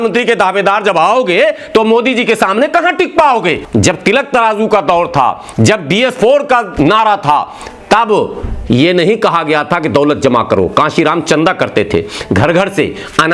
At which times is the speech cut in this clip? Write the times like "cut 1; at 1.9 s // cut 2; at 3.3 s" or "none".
cut 1; at 3.6 s